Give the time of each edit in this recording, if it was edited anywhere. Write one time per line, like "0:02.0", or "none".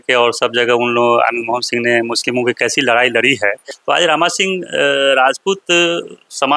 0:03.7